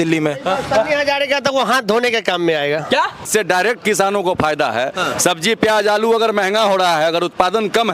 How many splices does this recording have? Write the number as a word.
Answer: one